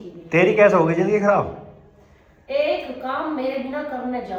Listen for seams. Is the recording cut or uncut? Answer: uncut